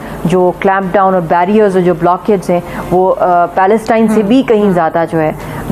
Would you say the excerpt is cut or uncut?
uncut